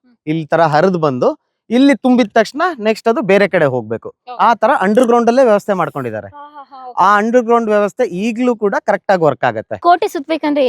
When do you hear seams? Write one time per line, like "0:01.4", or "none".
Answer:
0:09.8